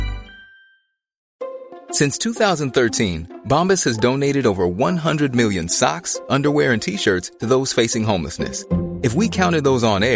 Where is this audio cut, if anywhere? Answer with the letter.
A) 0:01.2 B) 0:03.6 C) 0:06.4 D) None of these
A